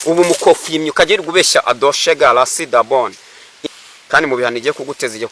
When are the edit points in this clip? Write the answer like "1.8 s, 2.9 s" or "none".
3.7 s